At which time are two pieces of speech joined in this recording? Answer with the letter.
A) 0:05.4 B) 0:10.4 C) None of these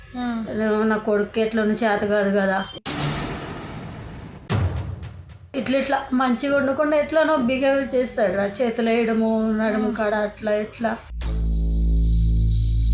A